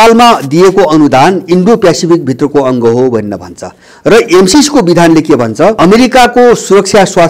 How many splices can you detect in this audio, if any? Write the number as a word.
one